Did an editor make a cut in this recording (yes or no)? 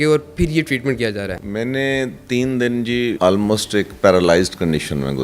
yes